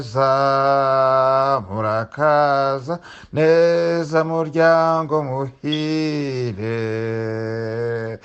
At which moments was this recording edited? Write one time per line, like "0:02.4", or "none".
none